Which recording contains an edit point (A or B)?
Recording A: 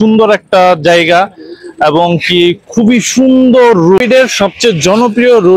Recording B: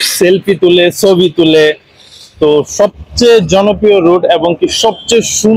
A